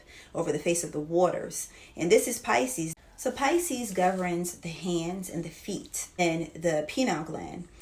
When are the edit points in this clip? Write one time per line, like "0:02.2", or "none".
0:02.8
0:06.2